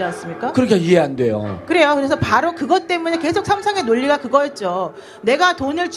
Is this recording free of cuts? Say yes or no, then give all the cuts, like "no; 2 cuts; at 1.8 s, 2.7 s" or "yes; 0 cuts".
yes; 0 cuts